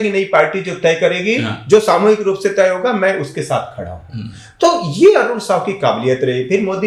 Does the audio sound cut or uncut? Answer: uncut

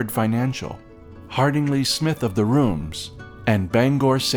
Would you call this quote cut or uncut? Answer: uncut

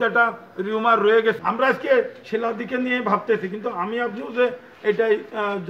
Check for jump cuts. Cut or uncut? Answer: cut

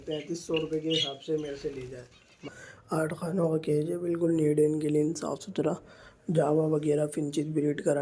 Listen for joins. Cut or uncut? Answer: cut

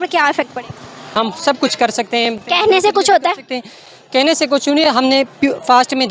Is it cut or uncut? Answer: cut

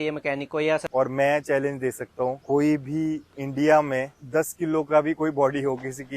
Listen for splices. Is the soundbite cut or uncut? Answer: cut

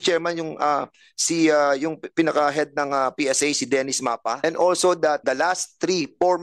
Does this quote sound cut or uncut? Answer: cut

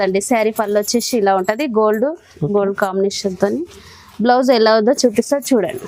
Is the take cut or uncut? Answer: uncut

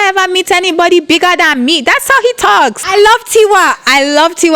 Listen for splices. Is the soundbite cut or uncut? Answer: cut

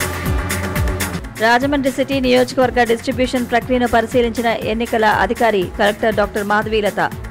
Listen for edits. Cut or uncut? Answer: cut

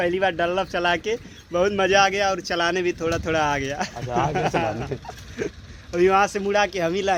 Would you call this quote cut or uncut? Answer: uncut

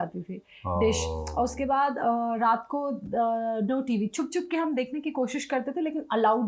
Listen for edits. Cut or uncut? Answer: uncut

